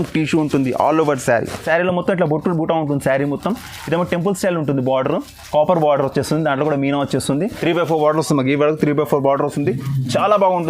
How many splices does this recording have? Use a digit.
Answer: 2